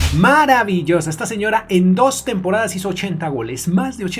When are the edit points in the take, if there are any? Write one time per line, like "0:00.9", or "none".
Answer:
none